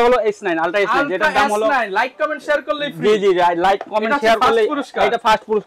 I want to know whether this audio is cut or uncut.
uncut